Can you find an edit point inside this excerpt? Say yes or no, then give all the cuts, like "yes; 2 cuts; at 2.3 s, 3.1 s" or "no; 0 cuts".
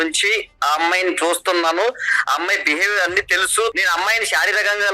yes; 1 cut; at 3.7 s